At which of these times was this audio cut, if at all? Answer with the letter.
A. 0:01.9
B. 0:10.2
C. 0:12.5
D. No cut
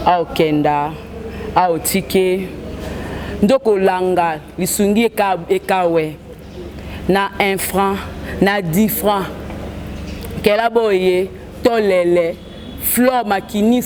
D